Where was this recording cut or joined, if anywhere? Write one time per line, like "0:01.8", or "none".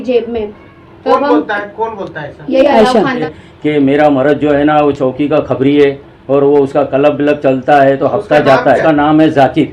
0:03.2
0:08.8